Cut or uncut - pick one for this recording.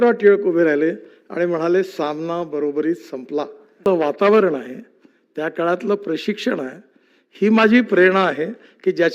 cut